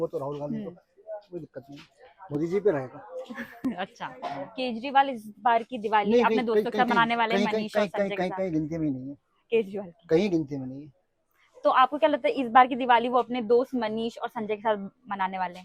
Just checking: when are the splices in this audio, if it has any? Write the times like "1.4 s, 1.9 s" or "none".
none